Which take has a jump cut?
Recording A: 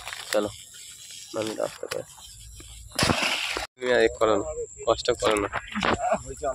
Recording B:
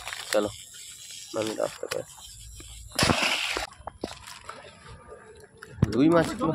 B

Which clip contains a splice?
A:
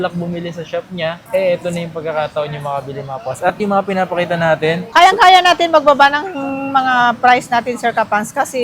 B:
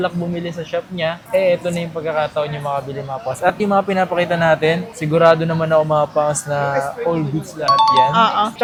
A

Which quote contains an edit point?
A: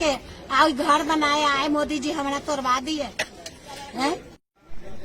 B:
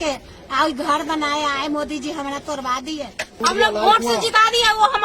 B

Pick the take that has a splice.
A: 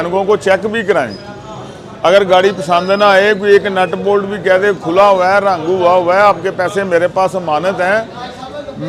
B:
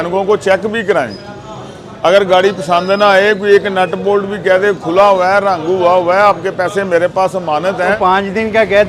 B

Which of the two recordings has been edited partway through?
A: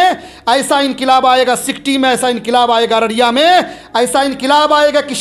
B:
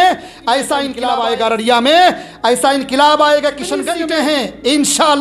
B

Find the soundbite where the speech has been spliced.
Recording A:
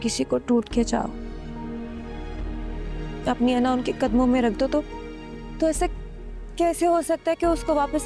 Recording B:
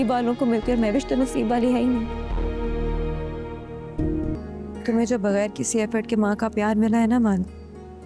B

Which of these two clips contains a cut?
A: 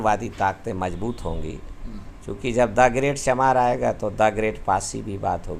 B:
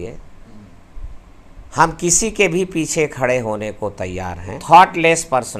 B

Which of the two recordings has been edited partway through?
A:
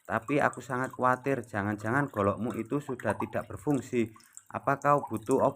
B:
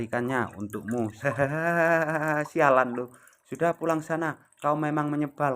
B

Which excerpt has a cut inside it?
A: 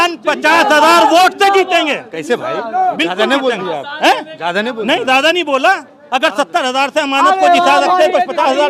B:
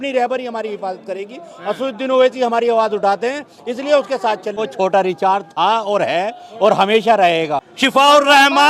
B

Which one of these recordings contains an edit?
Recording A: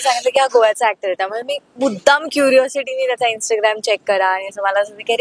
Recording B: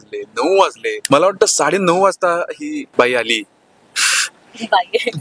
B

